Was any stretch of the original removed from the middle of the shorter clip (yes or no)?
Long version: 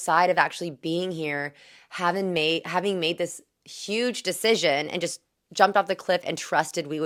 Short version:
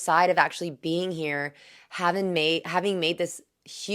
no